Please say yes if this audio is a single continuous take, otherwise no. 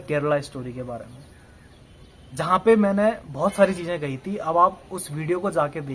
yes